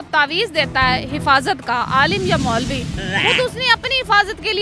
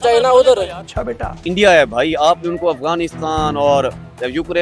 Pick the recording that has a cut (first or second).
second